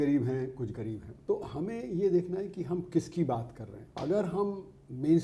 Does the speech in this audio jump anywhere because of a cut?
yes; 2 cuts; at 1.0 s, 3.8 s

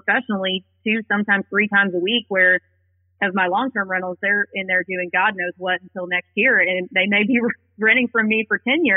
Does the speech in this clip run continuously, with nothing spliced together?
yes; 0 cuts

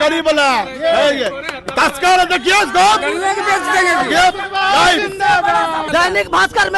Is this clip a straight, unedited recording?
no; 1 cut; at 5.8 s

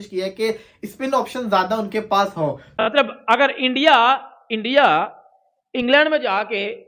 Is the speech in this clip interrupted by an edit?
yes; 1 cut; at 2.7 s

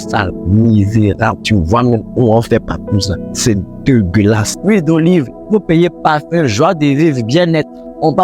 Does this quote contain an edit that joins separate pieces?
yes; 1 cut; at 4.5 s

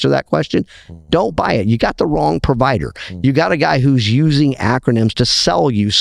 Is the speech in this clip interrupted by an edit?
no; 0 cuts

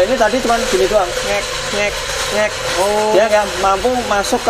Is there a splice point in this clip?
no; 0 cuts

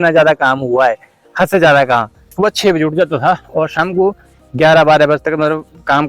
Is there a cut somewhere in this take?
yes; 1 cut; at 2.3 s

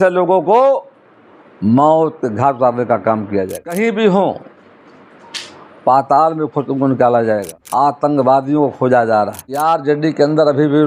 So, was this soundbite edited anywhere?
yes; 3 cuts; at 3.7 s, 7.6 s, 9.6 s

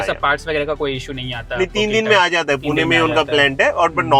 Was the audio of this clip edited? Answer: no; 0 cuts

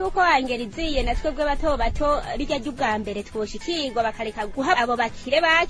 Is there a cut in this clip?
no; 0 cuts

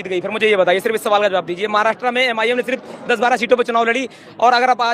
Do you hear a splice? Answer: no; 0 cuts

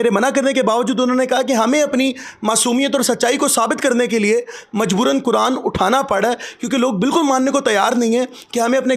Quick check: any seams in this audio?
no; 0 cuts

